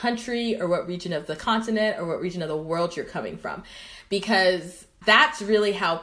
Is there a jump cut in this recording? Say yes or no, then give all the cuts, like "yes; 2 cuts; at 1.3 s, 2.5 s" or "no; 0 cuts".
no; 0 cuts